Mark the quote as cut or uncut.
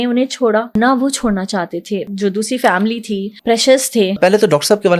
cut